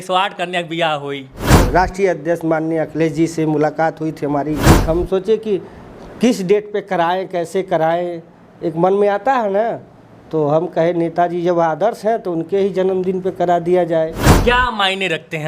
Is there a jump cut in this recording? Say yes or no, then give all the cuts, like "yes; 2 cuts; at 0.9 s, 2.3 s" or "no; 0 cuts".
yes; 3 cuts; at 1.6 s, 4.7 s, 14.3 s